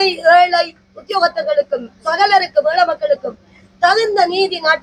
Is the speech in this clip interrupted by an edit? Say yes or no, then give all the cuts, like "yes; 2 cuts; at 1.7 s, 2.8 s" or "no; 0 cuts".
no; 0 cuts